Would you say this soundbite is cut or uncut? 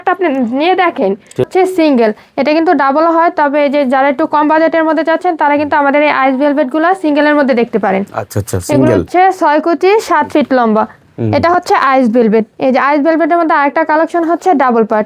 cut